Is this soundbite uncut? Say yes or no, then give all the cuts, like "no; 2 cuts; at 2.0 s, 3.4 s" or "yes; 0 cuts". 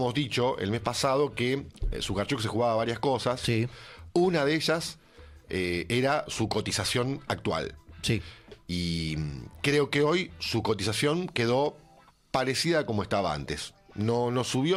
yes; 0 cuts